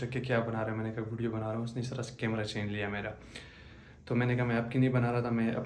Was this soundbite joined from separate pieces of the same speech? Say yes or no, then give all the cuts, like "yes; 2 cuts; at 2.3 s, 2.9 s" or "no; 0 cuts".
no; 0 cuts